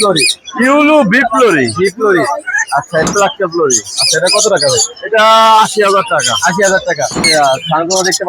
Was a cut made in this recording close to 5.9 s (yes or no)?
no